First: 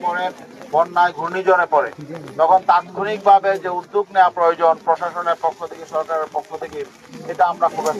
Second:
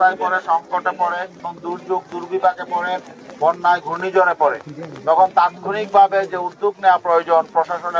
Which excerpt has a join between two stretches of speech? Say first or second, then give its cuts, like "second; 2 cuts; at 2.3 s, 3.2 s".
second; 1 cut; at 1.4 s